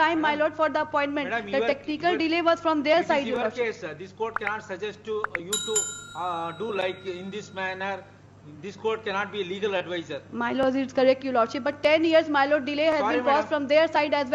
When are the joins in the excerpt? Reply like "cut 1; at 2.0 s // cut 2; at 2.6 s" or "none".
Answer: none